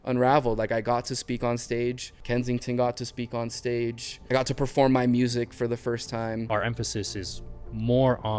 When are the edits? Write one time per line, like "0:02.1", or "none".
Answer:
0:02.1
0:04.1
0:06.5